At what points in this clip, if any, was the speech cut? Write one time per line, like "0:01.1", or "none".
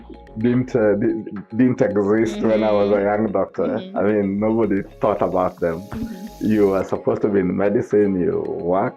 none